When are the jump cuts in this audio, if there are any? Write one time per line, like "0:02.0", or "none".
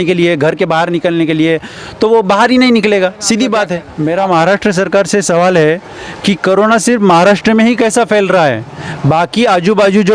0:03.9